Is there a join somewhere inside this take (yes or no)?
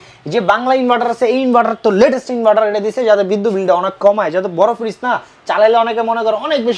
no